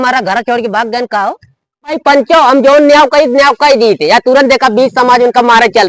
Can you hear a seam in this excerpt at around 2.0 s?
yes; 1 cut; at 2.0 s

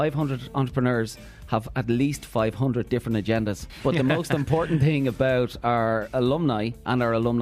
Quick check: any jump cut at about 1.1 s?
no; 1 cut; at 3.7 s

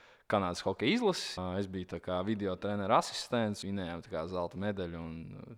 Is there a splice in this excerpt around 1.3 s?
yes; 2 cuts; at 1.3 s, 3.6 s

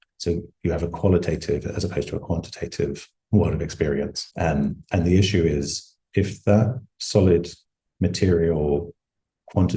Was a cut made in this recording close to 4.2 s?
yes; 2 cuts; at 4.2 s, 6.0 s

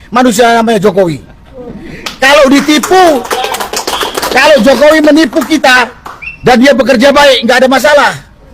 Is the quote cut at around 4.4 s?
yes; 1 cut; at 4.4 s

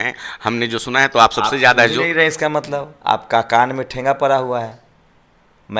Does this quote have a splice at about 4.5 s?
no; 0 cuts

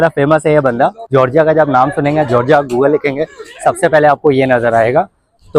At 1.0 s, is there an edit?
yes; 1 cut; at 1.0 s

